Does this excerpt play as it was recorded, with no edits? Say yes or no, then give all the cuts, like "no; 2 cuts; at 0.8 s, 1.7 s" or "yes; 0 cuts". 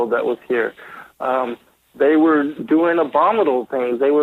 yes; 0 cuts